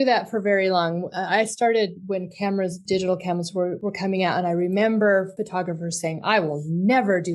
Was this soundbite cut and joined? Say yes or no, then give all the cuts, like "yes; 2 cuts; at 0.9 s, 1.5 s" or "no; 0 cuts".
yes; 3 cuts; at 2.8 s, 3.8 s, 5.4 s